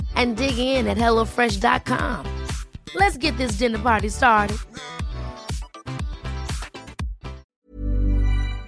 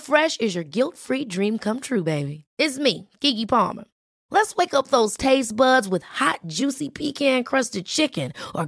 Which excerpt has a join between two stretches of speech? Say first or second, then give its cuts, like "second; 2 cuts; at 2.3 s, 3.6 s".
first; 1 cut; at 7.6 s